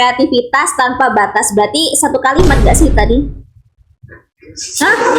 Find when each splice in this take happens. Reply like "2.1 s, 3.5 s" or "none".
none